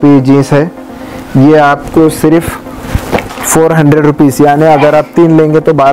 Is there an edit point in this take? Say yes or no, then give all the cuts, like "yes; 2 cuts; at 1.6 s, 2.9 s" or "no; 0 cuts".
no; 0 cuts